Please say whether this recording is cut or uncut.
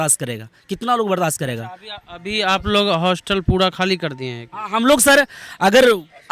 uncut